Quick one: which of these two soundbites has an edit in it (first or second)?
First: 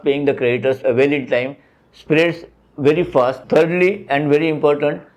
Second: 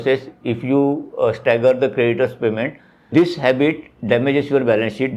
first